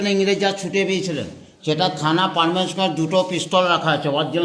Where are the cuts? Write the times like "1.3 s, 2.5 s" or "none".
none